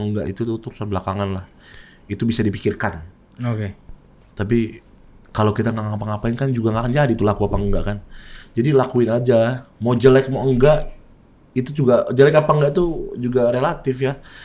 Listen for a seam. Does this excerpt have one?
no; 0 cuts

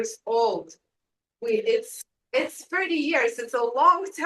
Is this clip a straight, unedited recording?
yes; 0 cuts

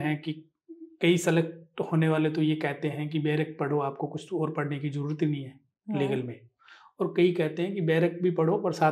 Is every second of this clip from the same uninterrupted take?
yes; 0 cuts

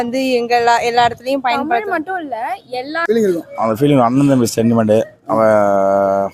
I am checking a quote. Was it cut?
yes; 1 cut; at 2.9 s

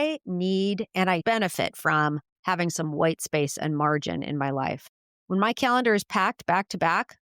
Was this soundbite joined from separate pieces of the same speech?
yes; 1 cut; at 1.2 s

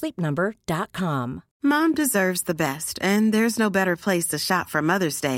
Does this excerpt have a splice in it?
yes; 1 cut; at 1.5 s

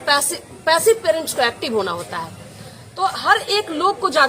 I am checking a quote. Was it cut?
no; 0 cuts

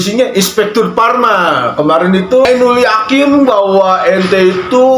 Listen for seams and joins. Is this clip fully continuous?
no; 1 cut; at 2.5 s

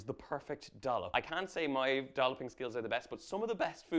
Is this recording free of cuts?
no; 1 cut; at 1.1 s

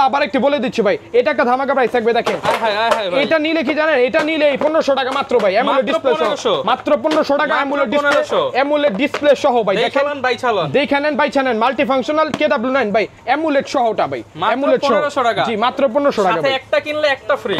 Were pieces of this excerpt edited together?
no; 0 cuts

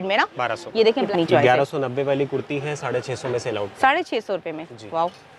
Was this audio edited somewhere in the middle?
yes; 1 cut; at 1.0 s

